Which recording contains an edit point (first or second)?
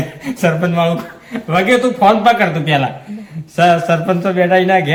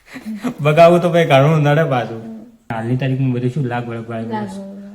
second